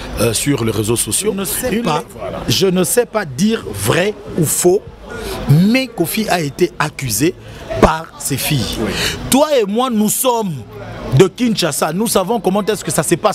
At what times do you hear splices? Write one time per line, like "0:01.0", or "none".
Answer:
0:01.5

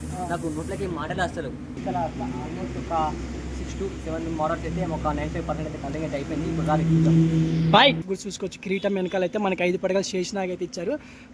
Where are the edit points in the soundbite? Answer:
0:01.8
0:08.1

